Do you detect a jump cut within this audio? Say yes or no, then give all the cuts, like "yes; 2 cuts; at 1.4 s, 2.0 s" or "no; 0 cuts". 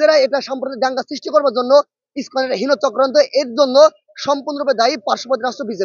no; 0 cuts